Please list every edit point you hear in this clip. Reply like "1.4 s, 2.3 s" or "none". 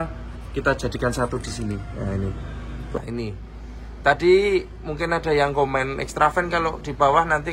2.8 s